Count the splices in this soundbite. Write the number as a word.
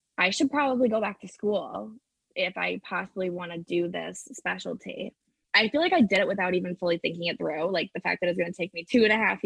one